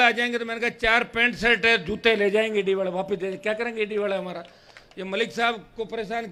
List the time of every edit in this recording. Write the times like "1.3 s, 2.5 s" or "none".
none